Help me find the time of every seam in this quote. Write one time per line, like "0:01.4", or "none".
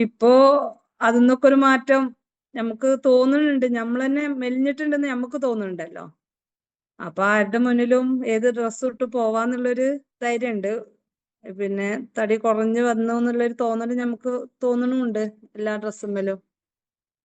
0:10.1